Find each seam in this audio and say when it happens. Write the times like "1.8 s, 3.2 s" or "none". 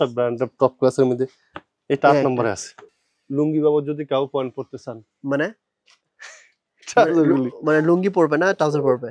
2.9 s